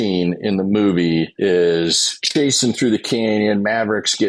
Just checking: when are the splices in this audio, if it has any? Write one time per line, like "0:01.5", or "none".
0:01.3
0:02.1